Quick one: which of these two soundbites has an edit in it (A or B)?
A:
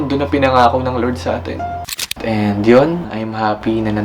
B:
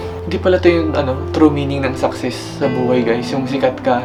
A